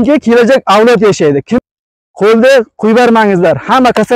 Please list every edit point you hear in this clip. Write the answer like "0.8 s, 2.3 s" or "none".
1.6 s